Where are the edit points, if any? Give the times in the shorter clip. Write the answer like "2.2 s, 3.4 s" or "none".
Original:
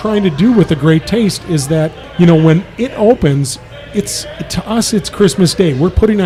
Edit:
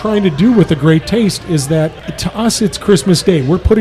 2.0 s